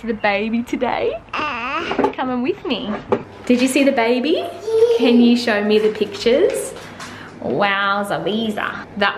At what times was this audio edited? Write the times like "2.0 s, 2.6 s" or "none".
3.2 s